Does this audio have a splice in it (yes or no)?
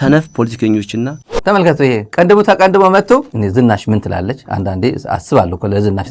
yes